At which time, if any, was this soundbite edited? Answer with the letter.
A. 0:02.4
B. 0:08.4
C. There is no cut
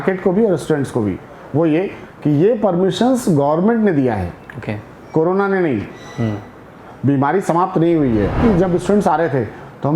B